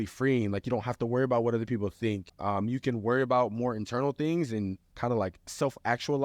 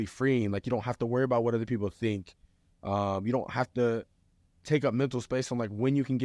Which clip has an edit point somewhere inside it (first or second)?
first